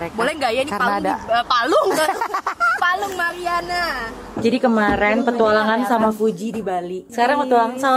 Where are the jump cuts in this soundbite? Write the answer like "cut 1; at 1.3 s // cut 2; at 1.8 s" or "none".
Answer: cut 1; at 4.2 s // cut 2; at 7.0 s